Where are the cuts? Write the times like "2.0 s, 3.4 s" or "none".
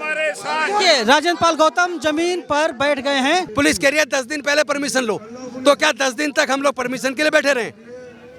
3.5 s